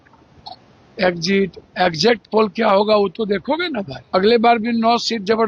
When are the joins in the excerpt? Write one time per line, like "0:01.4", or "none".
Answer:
0:03.9